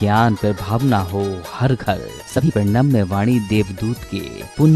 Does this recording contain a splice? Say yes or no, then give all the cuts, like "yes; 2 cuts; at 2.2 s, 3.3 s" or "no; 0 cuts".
yes; 1 cut; at 2.5 s